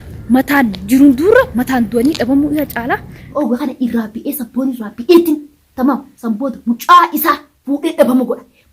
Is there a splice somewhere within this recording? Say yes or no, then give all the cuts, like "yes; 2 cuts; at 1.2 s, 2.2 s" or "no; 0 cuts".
yes; 1 cut; at 3.3 s